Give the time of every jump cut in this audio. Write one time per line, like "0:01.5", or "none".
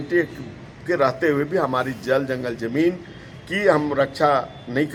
none